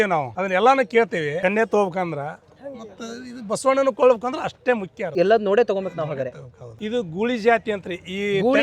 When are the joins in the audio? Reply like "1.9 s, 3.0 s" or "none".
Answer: 6.7 s